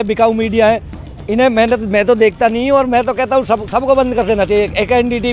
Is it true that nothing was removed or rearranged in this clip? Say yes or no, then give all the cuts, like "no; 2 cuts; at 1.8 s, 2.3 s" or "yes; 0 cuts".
yes; 0 cuts